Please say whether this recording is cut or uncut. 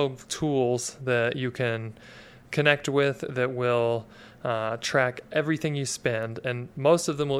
uncut